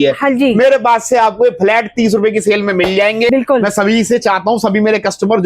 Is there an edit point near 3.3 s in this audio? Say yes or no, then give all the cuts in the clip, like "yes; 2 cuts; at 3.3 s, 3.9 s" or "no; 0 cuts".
yes; 1 cut; at 3.3 s